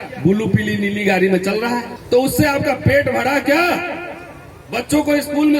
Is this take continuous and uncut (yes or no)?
no